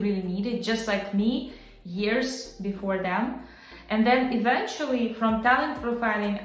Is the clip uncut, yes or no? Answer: yes